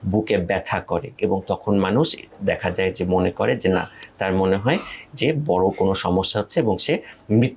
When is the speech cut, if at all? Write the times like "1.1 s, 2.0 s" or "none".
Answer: none